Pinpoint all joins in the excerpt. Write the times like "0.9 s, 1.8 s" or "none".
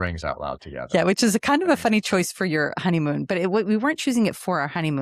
none